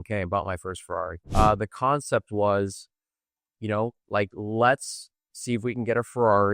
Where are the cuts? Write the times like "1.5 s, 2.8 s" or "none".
1.2 s

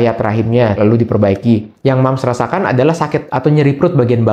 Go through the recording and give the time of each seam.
0.7 s, 1.7 s, 3.3 s

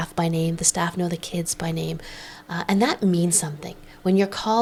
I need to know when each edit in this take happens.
none

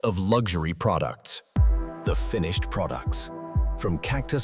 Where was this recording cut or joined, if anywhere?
1.5 s

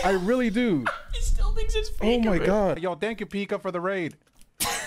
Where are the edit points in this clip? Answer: 2.8 s

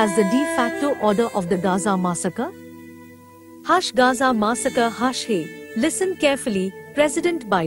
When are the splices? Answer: none

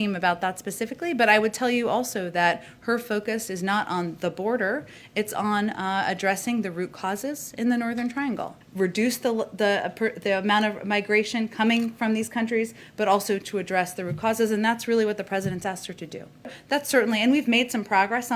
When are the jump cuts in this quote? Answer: 8.6 s, 16.6 s

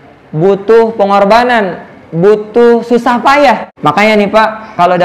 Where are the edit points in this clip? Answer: 3.7 s

